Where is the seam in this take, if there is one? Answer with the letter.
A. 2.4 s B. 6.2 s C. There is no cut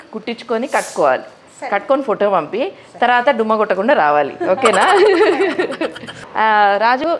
B